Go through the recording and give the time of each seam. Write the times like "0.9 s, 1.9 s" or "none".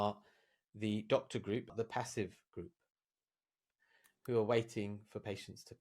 1.7 s, 3.6 s